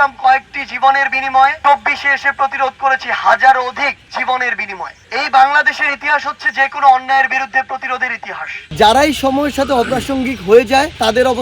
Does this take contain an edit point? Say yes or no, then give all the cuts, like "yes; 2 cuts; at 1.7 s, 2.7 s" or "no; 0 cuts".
yes; 2 cuts; at 1.6 s, 8.6 s